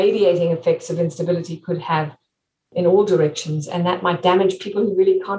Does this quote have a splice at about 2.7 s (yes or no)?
yes